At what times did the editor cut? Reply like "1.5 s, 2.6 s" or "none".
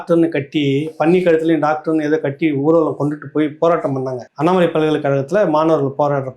4.2 s

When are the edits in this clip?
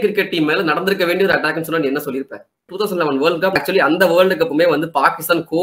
2.7 s, 3.6 s

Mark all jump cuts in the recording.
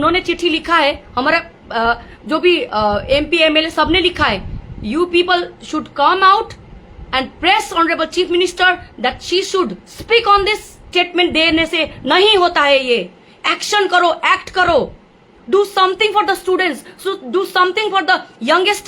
10.8 s

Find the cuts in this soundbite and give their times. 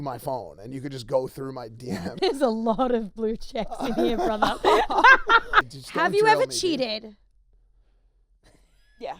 2.1 s, 5.6 s

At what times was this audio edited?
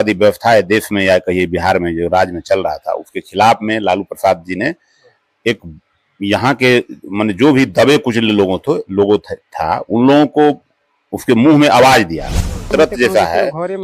12.7 s

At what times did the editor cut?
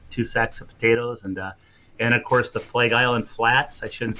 none

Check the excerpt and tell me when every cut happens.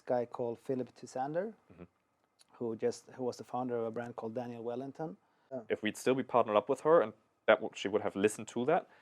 5.6 s

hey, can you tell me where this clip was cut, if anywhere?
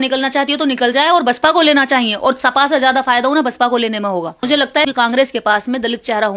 4.6 s

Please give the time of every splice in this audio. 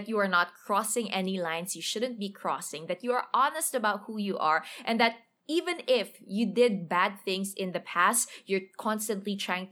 none

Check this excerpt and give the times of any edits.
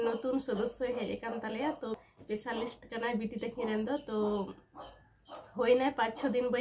2.2 s

